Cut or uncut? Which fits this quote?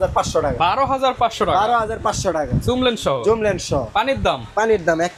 uncut